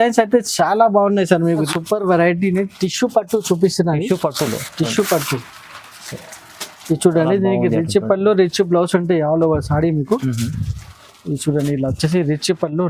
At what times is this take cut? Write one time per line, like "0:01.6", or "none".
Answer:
0:01.7